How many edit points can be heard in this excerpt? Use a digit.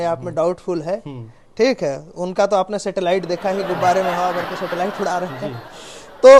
0